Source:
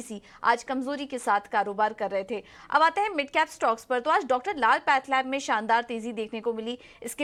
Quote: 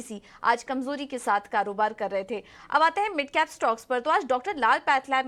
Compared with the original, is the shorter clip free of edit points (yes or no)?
yes